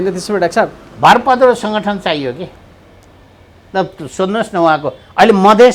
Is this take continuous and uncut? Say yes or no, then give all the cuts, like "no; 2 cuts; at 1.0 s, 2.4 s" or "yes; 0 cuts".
yes; 0 cuts